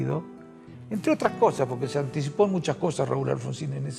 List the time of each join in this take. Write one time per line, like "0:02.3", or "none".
none